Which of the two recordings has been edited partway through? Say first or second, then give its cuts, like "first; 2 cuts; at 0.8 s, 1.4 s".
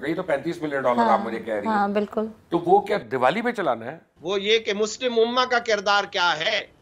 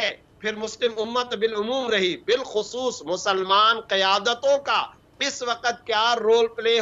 first; 1 cut; at 4.1 s